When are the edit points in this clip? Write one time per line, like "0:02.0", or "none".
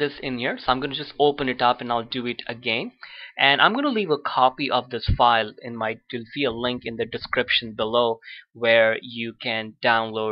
none